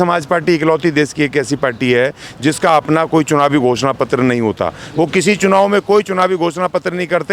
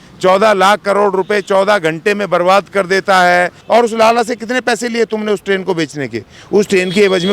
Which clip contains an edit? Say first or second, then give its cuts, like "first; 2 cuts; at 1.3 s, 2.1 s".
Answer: second; 1 cut; at 3.6 s